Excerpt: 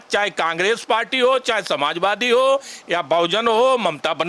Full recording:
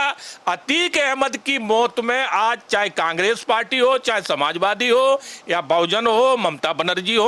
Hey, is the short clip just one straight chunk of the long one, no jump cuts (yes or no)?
yes